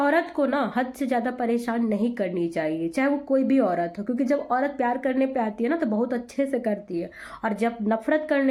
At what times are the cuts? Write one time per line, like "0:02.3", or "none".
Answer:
none